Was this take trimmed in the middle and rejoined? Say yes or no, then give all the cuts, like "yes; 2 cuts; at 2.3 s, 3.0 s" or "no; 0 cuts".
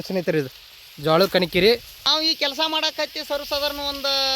yes; 1 cut; at 2.1 s